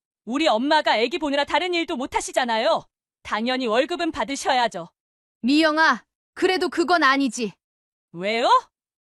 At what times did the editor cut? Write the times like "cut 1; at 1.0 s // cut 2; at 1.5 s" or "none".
none